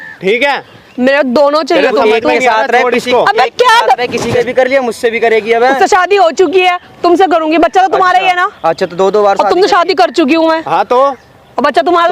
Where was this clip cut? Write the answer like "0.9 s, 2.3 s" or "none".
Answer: 4.2 s